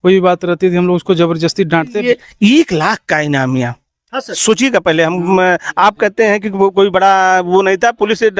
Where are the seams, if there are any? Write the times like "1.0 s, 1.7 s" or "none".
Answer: 1.9 s